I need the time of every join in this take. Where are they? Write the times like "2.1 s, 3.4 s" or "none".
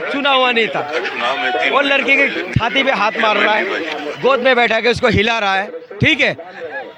none